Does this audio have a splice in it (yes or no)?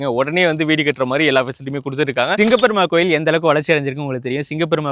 yes